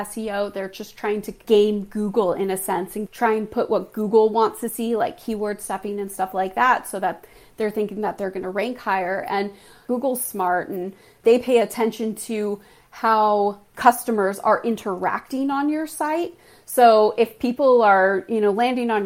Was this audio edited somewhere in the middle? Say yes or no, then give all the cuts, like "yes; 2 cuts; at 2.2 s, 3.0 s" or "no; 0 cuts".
yes; 3 cuts; at 1.4 s, 3.0 s, 9.8 s